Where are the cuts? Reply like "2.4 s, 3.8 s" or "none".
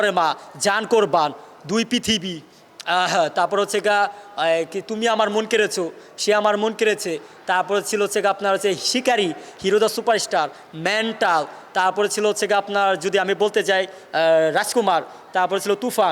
none

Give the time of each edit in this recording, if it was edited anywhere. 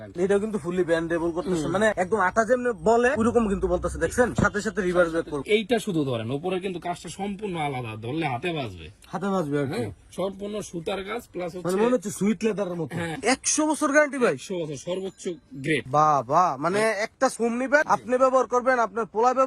5.4 s, 13.1 s

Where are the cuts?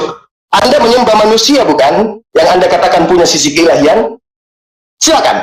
none

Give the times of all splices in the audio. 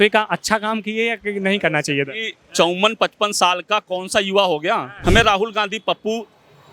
4.9 s

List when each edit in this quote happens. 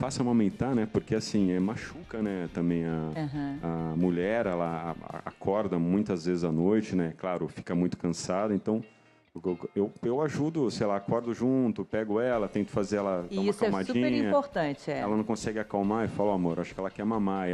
14.8 s

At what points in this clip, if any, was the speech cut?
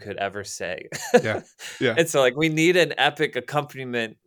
none

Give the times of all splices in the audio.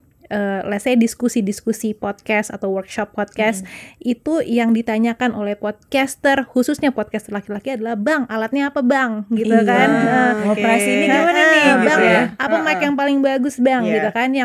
none

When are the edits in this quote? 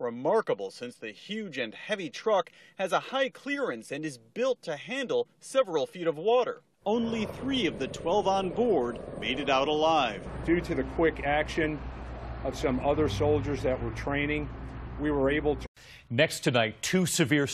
none

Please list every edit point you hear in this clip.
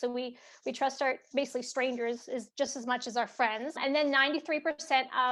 none

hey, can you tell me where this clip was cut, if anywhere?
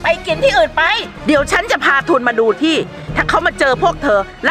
1.1 s

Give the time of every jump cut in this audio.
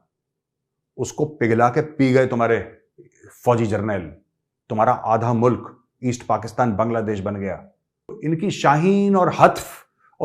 8.2 s

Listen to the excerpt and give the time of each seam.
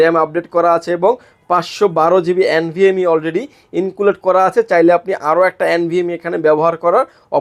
none

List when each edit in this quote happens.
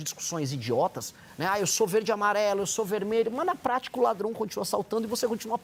none

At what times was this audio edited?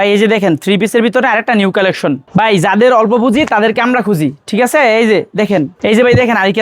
2.2 s, 5.7 s

